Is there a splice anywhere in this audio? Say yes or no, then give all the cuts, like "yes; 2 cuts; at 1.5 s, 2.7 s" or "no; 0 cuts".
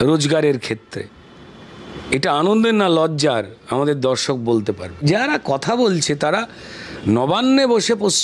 yes; 1 cut; at 5.0 s